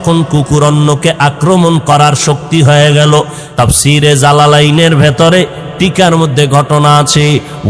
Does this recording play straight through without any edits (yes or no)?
no